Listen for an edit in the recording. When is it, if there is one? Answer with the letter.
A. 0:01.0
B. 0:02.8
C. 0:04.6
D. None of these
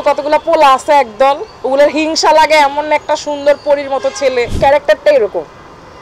C